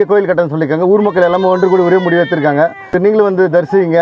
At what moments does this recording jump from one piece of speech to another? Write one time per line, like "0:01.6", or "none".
0:03.0